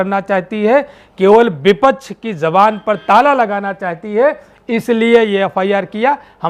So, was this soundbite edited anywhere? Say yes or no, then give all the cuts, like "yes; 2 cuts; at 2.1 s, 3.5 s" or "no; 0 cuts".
no; 0 cuts